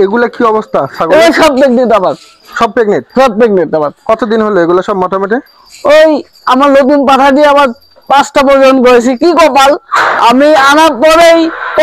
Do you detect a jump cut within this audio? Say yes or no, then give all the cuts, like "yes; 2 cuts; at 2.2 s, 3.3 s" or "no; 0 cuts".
no; 0 cuts